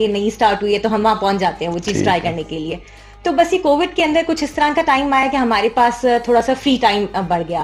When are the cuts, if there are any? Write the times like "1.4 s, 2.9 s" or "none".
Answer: none